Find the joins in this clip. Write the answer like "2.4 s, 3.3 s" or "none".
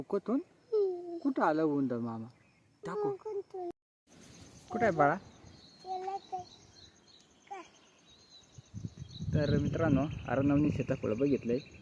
3.7 s